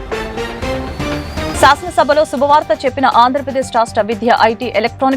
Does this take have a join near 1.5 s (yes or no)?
yes